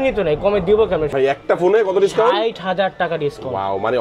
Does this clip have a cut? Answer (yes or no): yes